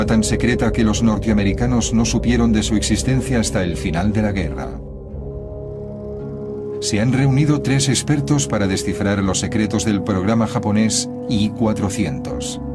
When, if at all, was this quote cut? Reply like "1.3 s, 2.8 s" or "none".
6.0 s